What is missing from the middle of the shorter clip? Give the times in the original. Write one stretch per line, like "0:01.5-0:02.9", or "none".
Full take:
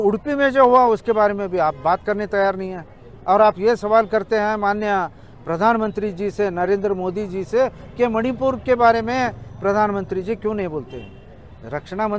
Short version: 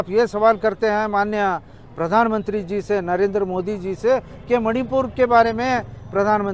none